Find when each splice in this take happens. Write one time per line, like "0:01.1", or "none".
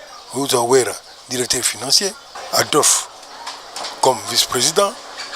0:02.3